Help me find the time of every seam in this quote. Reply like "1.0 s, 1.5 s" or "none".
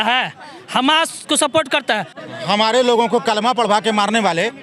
2.1 s